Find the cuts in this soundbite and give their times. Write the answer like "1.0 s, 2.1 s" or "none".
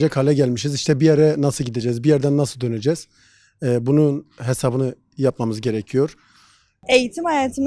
6.7 s